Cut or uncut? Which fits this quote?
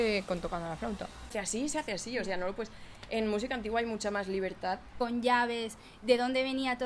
cut